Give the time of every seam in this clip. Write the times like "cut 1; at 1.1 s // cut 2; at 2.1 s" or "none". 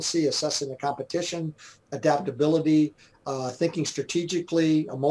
none